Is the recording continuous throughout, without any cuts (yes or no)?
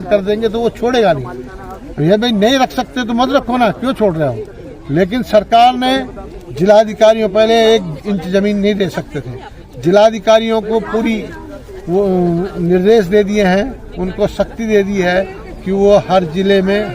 yes